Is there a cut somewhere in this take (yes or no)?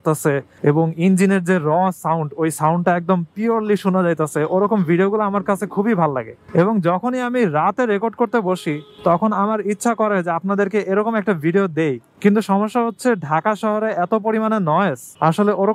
no